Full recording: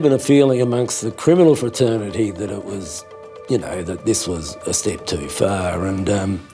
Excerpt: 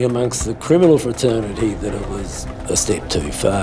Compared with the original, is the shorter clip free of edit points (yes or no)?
no